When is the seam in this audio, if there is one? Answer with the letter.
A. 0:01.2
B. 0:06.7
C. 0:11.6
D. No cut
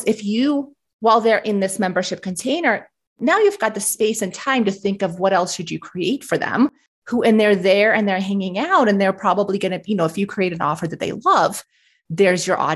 B